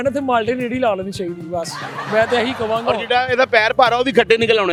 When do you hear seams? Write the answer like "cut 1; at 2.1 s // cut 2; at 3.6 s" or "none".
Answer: none